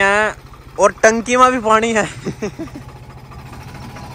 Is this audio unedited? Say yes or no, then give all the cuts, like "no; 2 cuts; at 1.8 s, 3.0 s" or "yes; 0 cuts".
yes; 0 cuts